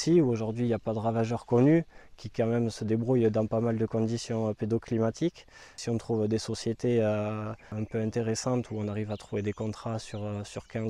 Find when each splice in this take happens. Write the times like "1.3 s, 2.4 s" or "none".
5.8 s, 7.7 s